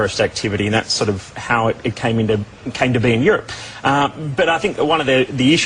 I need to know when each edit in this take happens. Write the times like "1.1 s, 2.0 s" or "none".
4.8 s